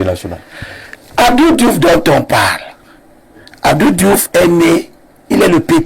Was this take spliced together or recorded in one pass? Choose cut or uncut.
uncut